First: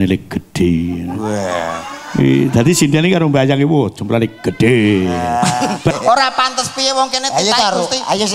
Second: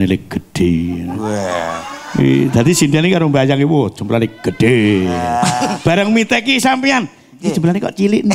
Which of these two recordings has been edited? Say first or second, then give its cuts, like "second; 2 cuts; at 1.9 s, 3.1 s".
first; 1 cut; at 5.9 s